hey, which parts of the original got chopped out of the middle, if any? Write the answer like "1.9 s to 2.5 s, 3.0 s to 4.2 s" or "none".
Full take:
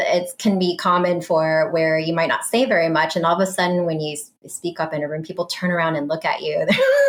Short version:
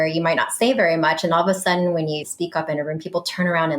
4.2 s to 4.5 s